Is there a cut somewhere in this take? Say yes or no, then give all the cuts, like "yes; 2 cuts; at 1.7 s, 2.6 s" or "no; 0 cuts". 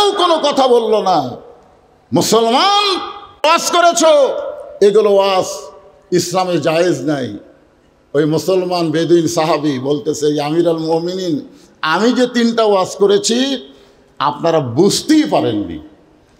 no; 0 cuts